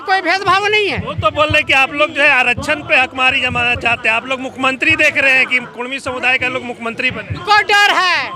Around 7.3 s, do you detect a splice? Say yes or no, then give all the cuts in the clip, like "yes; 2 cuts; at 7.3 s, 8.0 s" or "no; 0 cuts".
yes; 1 cut; at 7.3 s